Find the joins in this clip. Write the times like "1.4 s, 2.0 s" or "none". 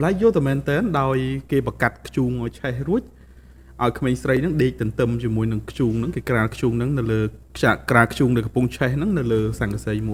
none